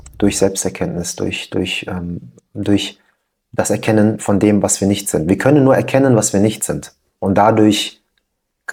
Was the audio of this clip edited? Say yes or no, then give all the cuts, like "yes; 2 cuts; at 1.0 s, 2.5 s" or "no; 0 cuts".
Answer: no; 0 cuts